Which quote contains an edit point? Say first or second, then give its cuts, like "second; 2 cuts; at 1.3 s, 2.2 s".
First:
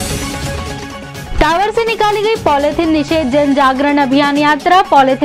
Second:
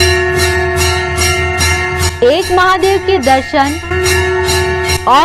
first; 1 cut; at 1.2 s